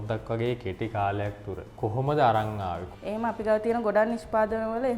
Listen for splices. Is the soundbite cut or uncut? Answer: cut